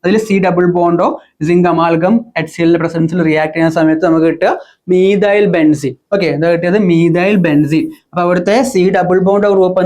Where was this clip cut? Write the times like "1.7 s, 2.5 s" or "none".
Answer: none